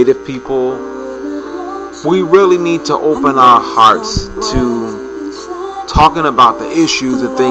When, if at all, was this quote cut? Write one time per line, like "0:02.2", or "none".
0:04.3

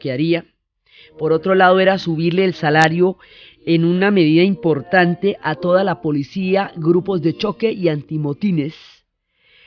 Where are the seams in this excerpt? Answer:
0:01.8

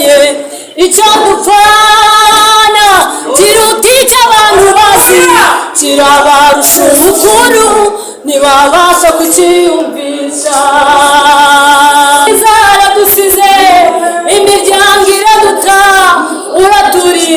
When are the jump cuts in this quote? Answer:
0:12.3

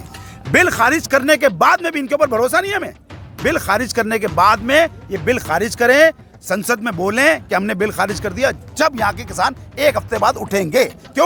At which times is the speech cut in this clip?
none

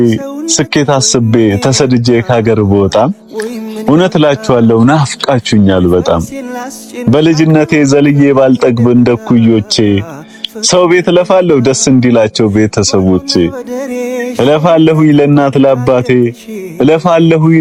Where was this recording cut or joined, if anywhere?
none

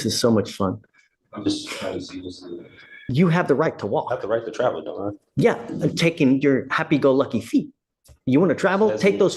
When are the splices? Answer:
0:03.0

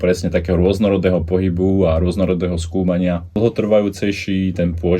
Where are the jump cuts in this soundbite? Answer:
0:03.3

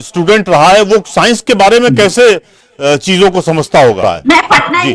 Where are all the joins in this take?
0:04.0

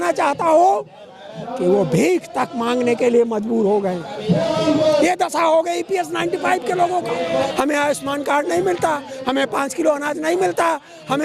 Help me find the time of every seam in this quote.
0:07.5

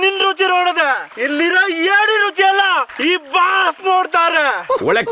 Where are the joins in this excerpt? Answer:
0:01.1
0:02.9

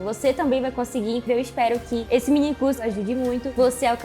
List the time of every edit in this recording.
0:01.2
0:02.8

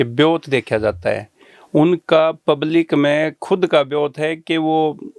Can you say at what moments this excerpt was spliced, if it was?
none

